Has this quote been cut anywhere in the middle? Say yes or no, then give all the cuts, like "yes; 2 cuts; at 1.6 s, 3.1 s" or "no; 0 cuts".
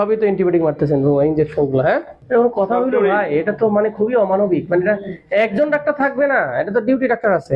yes; 1 cut; at 2.1 s